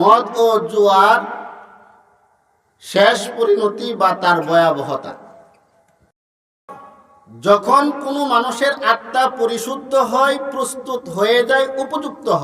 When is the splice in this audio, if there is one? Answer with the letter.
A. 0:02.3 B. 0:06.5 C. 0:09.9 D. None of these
B